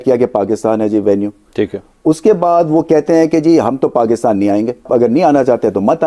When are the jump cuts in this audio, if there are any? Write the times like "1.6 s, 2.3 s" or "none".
4.9 s